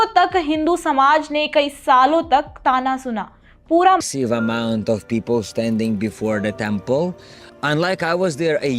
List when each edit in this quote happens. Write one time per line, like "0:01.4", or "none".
0:04.0